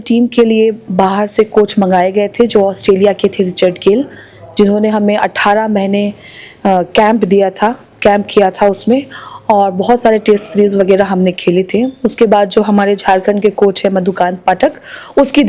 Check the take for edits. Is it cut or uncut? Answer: uncut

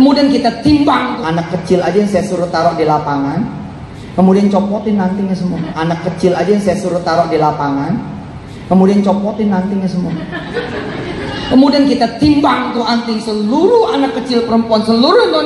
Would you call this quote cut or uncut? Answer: cut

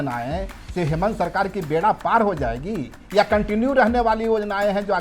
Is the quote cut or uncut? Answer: uncut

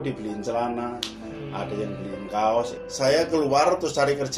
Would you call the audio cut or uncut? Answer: cut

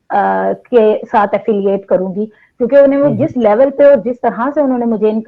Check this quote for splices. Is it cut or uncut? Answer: uncut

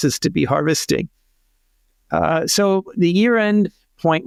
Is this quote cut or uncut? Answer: uncut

